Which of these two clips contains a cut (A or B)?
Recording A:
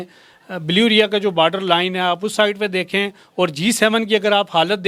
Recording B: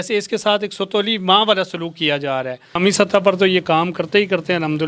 B